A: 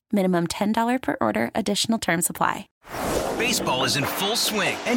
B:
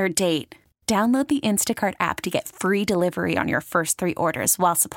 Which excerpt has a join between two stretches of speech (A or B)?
A